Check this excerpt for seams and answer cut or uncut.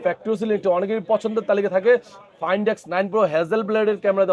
uncut